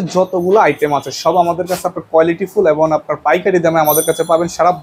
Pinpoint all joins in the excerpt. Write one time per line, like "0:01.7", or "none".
none